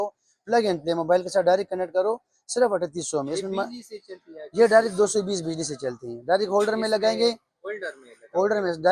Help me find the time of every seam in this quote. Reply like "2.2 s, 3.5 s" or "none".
none